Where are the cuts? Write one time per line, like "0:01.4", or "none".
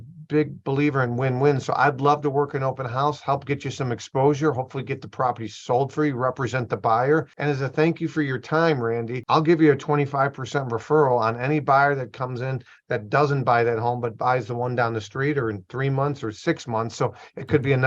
0:07.3
0:09.2